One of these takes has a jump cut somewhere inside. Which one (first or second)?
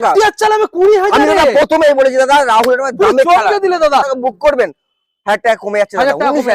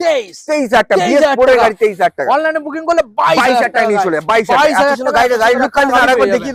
first